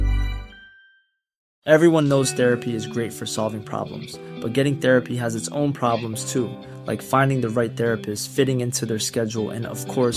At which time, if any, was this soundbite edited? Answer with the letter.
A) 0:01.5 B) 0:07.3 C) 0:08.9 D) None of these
A